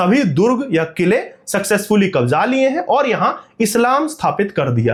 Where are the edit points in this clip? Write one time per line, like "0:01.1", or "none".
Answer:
none